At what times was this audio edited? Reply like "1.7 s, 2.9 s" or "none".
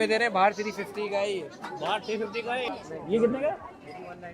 2.7 s